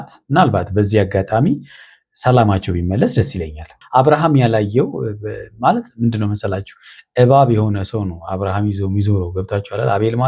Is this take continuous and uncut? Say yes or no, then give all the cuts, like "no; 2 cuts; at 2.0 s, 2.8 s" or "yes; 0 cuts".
no; 1 cut; at 3.7 s